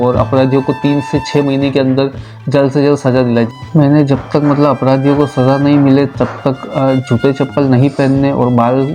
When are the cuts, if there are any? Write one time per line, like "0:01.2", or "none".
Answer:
0:03.5